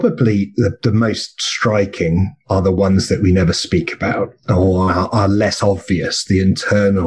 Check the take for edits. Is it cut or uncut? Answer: uncut